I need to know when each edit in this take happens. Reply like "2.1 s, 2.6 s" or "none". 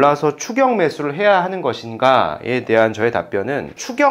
none